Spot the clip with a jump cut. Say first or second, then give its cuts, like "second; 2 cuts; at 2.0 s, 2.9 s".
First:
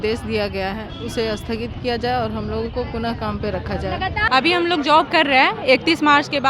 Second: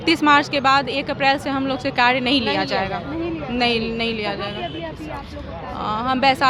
first; 1 cut; at 4.1 s